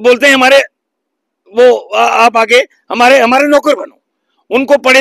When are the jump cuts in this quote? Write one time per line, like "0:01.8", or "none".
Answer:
none